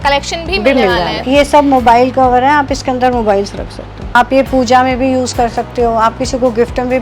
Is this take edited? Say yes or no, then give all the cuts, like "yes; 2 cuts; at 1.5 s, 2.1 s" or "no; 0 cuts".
yes; 2 cuts; at 1.2 s, 4.2 s